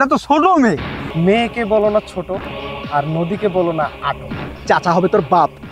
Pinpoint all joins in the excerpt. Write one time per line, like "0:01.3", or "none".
0:01.0
0:04.6